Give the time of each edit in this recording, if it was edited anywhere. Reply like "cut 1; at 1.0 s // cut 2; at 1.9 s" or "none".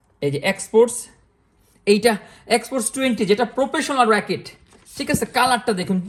none